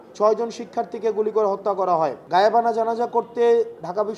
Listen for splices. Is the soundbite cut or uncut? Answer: cut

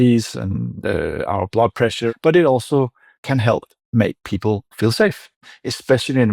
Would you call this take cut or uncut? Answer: cut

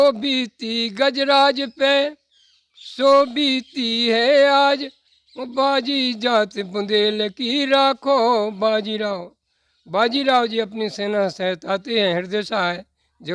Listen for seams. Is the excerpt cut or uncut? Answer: uncut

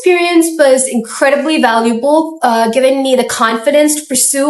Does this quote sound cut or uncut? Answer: uncut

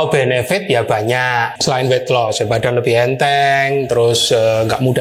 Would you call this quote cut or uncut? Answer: cut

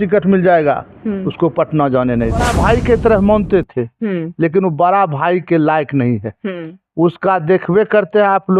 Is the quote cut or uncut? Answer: cut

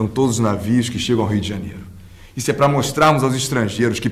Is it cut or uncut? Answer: uncut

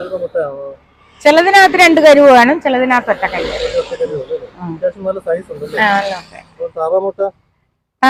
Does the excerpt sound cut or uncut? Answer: uncut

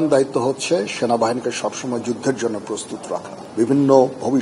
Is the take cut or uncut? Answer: cut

